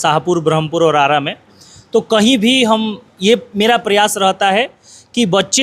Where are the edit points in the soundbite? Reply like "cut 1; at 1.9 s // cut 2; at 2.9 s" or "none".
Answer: none